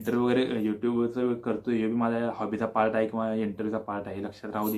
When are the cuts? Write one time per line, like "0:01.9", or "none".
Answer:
none

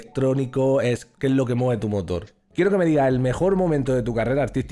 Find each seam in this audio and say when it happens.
0:02.4

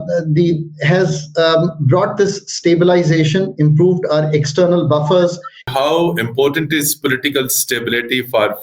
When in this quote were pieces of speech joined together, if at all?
0:05.7

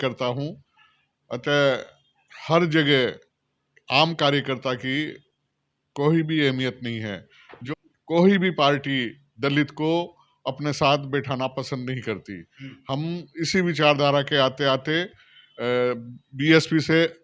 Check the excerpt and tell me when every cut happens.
0:07.5

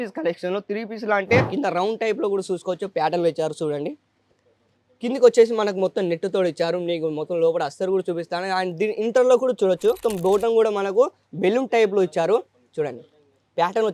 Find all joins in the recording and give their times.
0:01.5
0:10.0

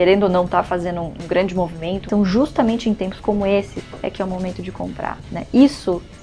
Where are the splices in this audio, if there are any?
0:01.2
0:02.1
0:03.8

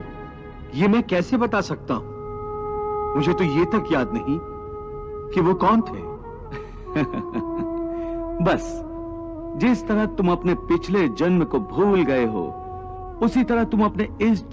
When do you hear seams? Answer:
none

